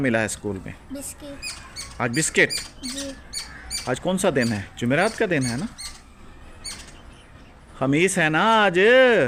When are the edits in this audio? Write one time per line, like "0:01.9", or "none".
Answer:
none

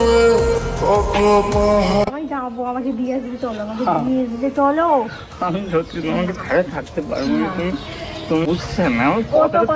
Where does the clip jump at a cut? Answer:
0:08.5

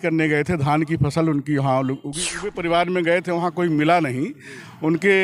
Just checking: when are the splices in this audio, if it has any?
0:02.2

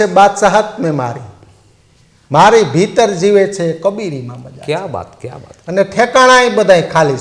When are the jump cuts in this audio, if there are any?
none

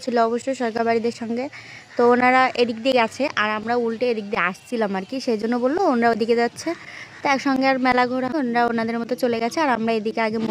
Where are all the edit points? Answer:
0:08.3

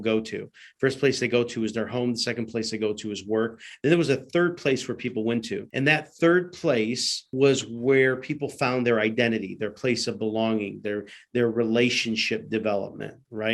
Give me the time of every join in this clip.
0:05.6
0:07.3

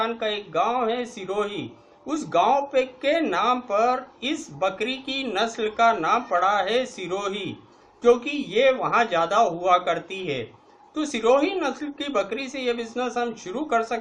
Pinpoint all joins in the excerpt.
0:12.6

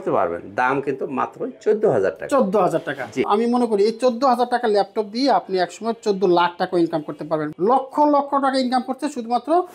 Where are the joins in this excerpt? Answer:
0:03.3
0:07.5

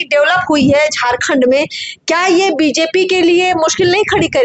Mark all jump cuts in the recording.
none

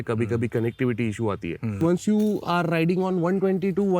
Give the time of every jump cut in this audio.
0:01.8

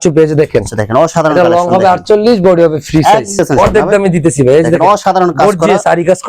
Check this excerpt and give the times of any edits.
0:03.4

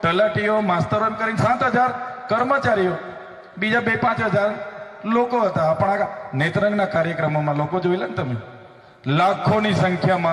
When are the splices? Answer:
none

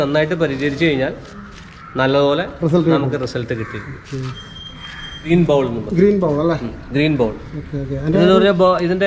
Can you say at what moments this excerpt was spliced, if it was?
0:05.3

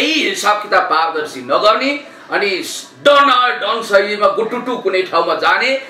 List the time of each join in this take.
none

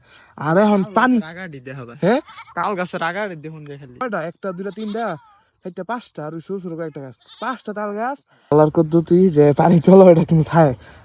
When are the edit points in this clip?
0:04.0
0:08.5

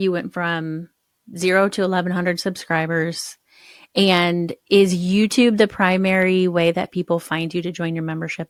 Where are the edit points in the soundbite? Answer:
none

